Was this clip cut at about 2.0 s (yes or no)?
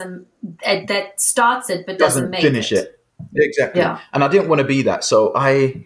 yes